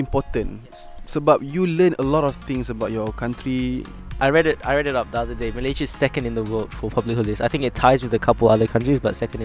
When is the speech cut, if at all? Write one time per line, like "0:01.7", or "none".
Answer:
0:03.7